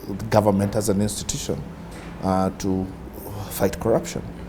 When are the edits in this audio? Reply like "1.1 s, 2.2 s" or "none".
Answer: none